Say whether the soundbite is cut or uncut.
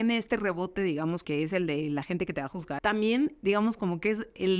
cut